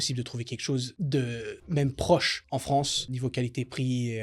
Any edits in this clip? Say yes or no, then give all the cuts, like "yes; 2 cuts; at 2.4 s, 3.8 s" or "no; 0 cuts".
yes; 3 cuts; at 0.9 s, 1.6 s, 2.8 s